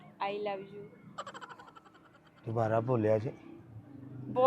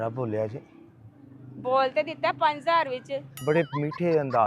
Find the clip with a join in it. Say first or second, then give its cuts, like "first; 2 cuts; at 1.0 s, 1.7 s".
second; 1 cut; at 3.4 s